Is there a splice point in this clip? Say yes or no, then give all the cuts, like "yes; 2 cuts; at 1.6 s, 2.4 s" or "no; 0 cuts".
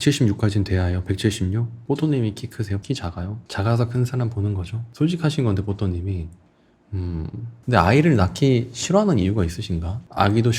no; 0 cuts